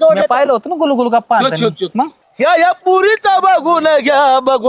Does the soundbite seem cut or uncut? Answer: cut